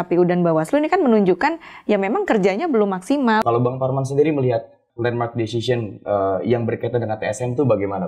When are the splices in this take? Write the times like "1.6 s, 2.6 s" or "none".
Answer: 3.4 s, 4.8 s